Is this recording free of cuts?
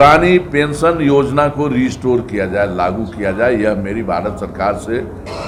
yes; 0 cuts

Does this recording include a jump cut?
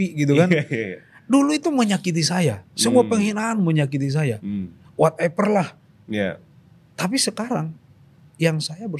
no; 0 cuts

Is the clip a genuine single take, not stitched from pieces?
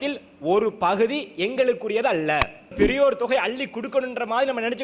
no; 1 cut; at 2.7 s

